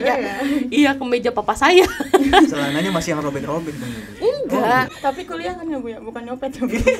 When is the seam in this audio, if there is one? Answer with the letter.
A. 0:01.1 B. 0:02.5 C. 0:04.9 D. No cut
C